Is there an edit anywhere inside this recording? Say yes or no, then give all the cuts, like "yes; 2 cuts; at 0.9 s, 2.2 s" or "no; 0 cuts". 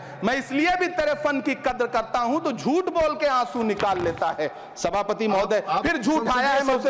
no; 0 cuts